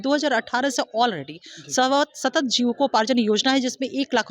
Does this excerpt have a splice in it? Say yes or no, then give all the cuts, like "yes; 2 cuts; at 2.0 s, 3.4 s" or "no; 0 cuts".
no; 0 cuts